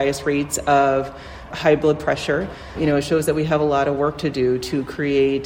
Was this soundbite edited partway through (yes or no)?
yes